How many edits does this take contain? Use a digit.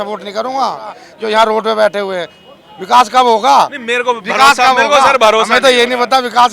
1